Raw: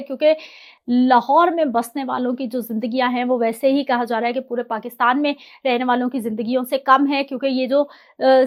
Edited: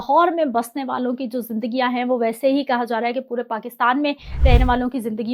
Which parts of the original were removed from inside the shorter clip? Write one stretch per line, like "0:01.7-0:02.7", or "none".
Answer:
none